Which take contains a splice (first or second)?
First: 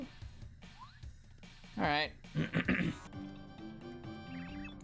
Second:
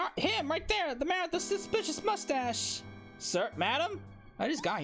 first